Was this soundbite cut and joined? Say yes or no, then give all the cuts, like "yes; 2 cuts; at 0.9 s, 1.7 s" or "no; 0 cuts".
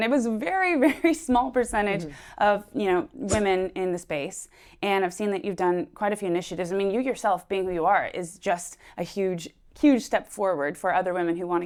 no; 0 cuts